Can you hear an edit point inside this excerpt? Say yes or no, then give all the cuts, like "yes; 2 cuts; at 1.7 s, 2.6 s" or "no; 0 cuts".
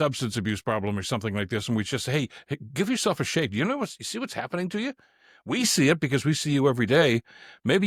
no; 0 cuts